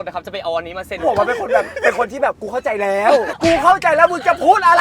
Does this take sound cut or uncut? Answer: cut